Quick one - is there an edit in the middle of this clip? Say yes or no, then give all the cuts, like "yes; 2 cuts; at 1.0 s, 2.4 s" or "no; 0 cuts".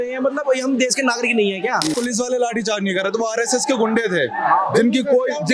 yes; 1 cut; at 1.9 s